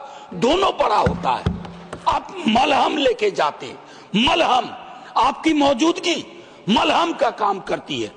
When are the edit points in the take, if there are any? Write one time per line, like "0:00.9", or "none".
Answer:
none